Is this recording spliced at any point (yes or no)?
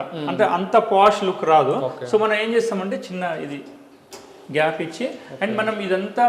no